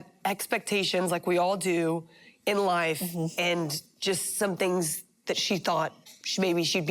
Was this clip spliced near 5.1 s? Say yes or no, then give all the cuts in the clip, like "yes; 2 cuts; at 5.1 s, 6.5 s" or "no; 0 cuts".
no; 0 cuts